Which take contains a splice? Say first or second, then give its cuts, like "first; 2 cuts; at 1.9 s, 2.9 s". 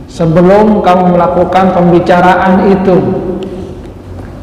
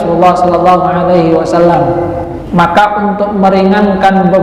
second; 1 cut; at 2.3 s